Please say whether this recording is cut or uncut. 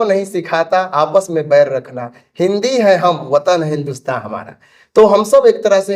uncut